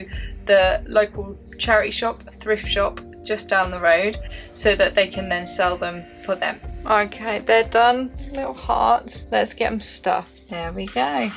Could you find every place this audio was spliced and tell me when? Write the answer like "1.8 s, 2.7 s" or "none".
6.8 s, 8.2 s, 9.2 s, 10.4 s